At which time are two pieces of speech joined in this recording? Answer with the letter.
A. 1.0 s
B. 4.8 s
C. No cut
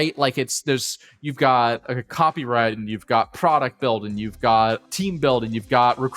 B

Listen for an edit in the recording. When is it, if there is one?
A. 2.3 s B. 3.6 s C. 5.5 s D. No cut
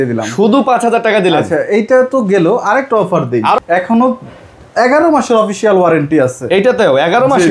B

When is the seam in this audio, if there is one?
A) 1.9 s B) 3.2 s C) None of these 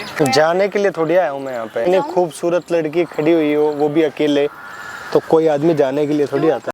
A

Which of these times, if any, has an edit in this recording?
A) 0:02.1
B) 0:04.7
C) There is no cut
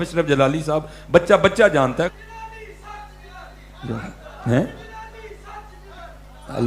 A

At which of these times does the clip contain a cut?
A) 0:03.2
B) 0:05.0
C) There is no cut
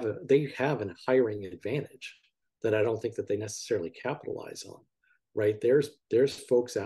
C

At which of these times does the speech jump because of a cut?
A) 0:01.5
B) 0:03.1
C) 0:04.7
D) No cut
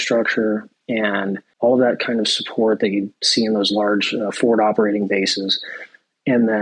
A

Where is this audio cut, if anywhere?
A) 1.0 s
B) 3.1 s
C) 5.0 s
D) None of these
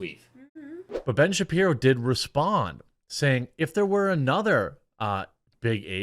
A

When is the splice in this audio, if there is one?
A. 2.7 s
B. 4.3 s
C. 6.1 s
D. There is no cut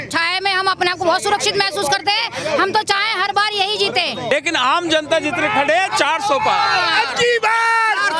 B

